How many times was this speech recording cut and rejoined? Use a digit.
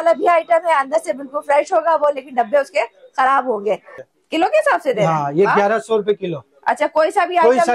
1